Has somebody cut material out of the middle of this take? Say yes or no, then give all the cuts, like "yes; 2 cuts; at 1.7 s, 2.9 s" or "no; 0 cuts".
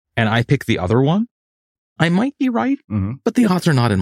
yes; 1 cut; at 2.0 s